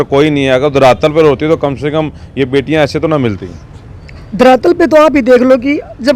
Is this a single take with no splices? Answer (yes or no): yes